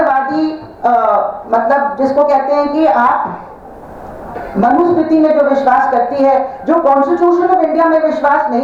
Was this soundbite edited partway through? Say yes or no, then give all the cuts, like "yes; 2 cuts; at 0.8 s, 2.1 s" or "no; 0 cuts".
no; 0 cuts